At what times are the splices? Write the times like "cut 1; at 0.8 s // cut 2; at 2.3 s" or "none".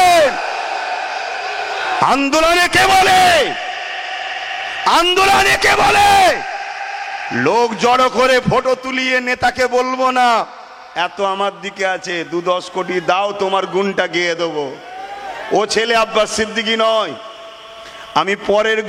none